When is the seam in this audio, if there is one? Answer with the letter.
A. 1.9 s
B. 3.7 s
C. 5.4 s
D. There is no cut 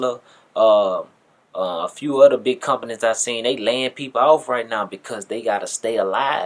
D